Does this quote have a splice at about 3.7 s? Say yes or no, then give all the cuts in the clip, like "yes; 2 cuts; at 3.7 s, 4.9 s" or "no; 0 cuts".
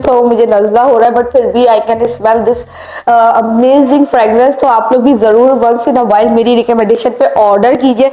no; 0 cuts